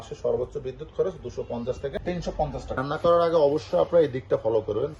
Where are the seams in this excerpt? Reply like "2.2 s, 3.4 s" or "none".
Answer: 2.7 s